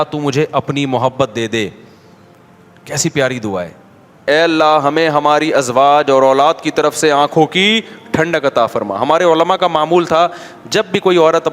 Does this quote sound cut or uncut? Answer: cut